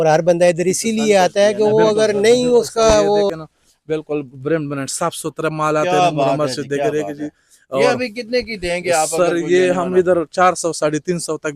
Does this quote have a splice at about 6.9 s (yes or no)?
no